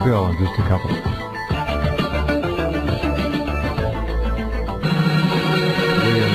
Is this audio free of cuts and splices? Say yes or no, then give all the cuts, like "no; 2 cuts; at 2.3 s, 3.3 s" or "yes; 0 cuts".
no; 1 cut; at 1.9 s